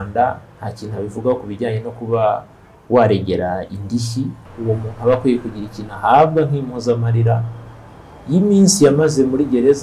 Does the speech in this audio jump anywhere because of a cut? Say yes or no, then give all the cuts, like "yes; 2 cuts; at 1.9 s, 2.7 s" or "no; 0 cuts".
yes; 1 cut; at 4.4 s